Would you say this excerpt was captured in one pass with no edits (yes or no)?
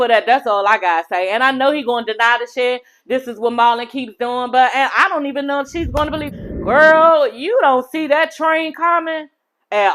no